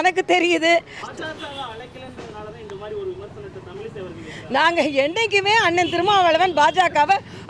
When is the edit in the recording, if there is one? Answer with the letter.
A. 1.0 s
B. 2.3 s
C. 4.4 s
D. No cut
A